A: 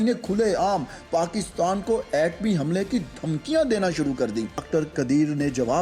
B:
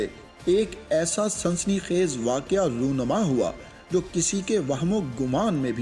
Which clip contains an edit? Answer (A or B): A